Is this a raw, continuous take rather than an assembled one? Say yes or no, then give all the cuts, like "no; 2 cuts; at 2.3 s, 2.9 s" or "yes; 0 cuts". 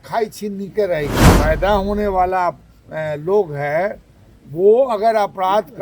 no; 1 cut; at 1.3 s